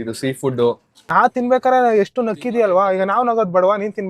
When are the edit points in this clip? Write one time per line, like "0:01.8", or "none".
0:01.3